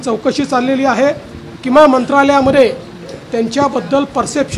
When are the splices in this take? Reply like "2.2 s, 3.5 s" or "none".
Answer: none